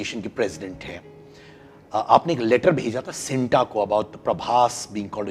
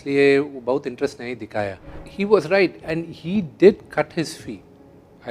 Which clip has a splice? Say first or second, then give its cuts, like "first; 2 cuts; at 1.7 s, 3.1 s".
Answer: second; 1 cut; at 1.9 s